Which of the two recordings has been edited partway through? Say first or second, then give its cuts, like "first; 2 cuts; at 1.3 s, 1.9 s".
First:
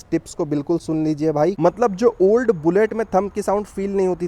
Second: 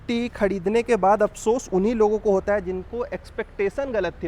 first; 1 cut; at 1.6 s